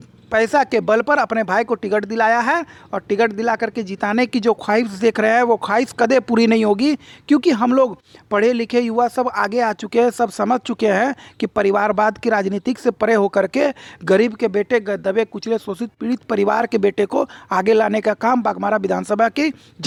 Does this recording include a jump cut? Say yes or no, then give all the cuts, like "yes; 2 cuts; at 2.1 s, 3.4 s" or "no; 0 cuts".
no; 0 cuts